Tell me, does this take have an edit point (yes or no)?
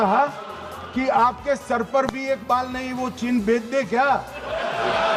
no